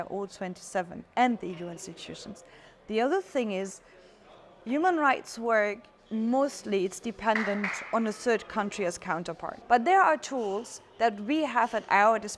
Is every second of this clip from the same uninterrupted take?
yes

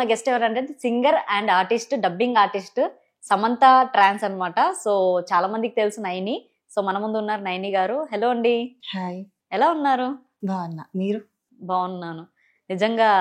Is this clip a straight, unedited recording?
yes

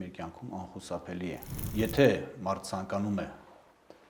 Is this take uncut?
no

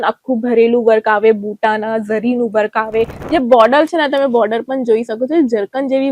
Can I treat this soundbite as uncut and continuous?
no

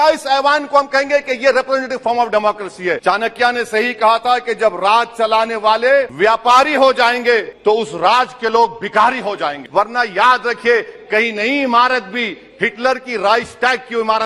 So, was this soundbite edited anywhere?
yes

